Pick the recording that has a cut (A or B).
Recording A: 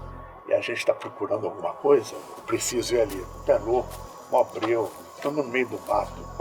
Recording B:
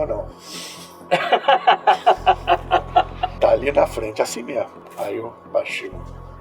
B